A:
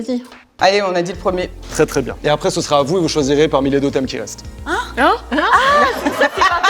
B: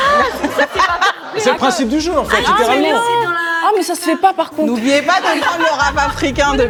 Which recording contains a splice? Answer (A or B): A